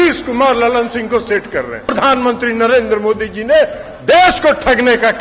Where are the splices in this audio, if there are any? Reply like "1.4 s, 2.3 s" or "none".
1.9 s